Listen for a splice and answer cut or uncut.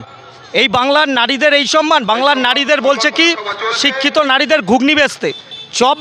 uncut